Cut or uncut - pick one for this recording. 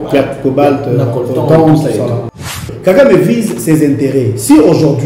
cut